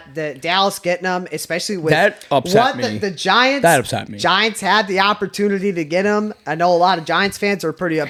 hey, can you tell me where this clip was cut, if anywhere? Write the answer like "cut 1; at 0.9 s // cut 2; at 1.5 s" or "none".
none